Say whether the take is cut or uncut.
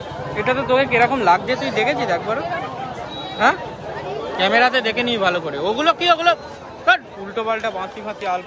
uncut